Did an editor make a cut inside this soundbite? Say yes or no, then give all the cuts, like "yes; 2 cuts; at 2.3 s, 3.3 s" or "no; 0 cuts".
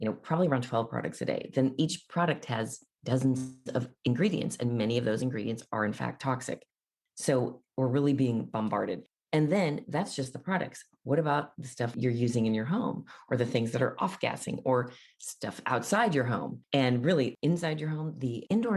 yes; 2 cuts; at 12.0 s, 16.5 s